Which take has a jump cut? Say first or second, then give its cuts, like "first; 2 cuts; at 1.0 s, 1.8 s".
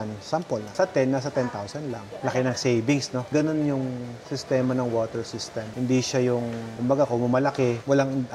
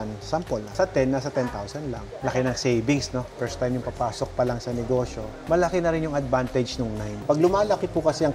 second; 2 cuts; at 3.3 s, 7.1 s